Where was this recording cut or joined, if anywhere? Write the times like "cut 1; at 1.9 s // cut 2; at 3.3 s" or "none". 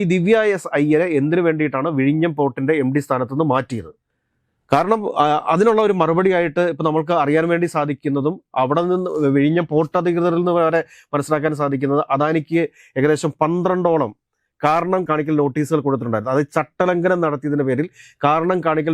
none

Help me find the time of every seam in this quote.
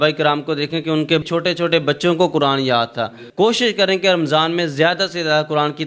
cut 1; at 1.3 s // cut 2; at 3.2 s

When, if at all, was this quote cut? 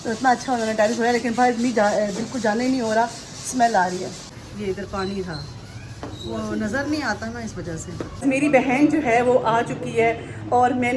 none

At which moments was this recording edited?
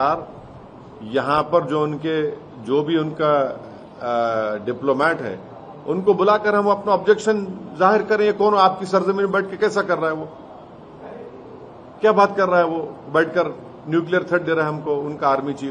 none

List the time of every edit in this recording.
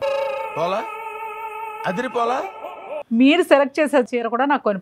cut 1; at 2.9 s // cut 2; at 4.1 s

